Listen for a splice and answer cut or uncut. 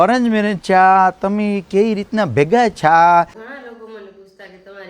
cut